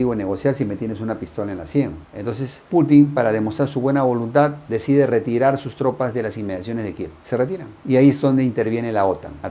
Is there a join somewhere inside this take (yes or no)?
no